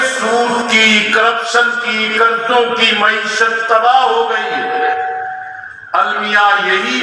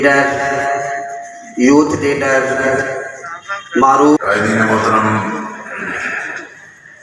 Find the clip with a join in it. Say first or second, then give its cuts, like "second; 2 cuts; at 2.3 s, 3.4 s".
second; 1 cut; at 4.2 s